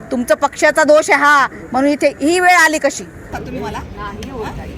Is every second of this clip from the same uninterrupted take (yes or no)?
no